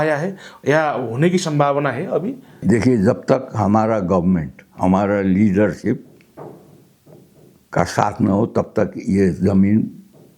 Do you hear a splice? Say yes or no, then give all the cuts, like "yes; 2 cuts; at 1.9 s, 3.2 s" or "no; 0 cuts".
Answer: yes; 1 cut; at 2.5 s